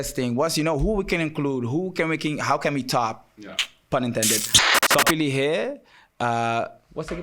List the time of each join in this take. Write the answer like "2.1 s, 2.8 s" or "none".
4.5 s